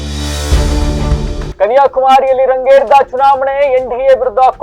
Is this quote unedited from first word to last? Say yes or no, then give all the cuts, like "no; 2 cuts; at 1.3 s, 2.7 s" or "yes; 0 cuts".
no; 1 cut; at 1.5 s